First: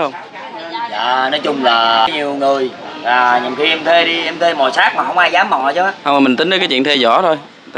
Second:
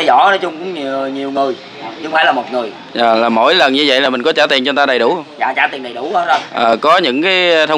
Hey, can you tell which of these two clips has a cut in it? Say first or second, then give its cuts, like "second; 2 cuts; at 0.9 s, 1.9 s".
first; 1 cut; at 2.1 s